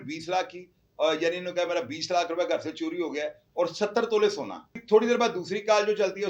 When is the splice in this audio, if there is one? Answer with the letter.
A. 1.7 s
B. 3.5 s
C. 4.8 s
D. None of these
C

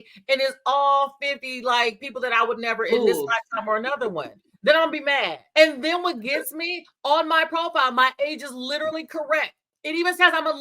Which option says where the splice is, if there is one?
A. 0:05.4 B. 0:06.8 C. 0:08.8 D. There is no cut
A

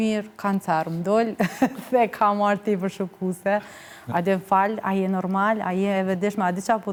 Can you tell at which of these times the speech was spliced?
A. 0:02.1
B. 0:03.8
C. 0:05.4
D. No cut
D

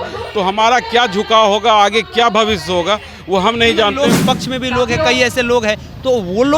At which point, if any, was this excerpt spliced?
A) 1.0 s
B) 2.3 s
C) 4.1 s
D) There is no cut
C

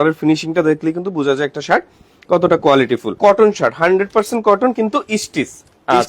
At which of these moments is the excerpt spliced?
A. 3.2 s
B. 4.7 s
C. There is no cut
A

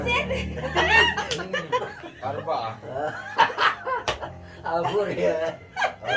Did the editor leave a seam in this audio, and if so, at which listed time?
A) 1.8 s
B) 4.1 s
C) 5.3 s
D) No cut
A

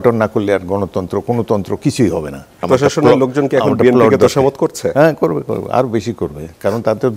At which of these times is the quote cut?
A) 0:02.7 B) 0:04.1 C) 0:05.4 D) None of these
A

